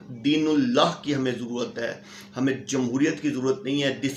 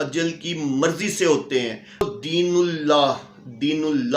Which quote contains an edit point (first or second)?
second